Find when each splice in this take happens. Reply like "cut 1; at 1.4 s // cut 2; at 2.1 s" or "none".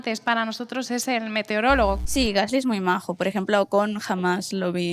cut 1; at 2.0 s